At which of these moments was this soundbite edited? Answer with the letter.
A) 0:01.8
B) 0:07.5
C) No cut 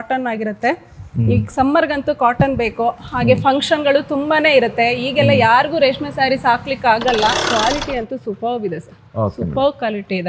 B